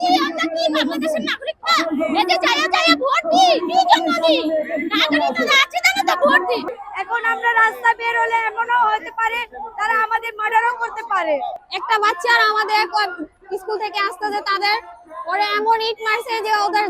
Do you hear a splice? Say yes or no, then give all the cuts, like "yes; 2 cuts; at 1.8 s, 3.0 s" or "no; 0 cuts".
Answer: yes; 2 cuts; at 6.7 s, 11.7 s